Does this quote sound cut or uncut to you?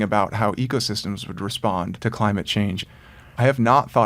cut